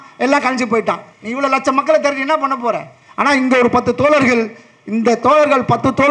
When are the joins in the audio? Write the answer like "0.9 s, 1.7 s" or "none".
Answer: none